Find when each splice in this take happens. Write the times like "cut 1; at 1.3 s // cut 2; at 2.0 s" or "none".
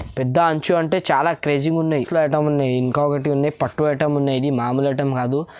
cut 1; at 2.1 s